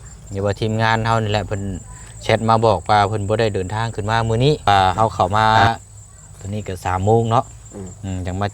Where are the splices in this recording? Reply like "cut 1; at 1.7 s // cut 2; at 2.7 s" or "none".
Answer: cut 1; at 4.7 s